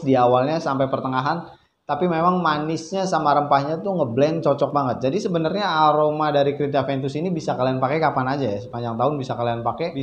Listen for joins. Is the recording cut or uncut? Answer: uncut